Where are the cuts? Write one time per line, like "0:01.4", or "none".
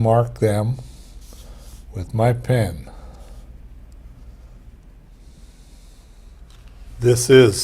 0:06.2